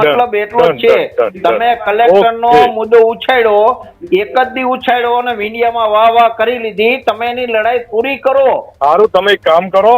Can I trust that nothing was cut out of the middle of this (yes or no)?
no